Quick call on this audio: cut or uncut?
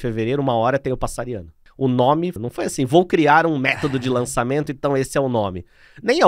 cut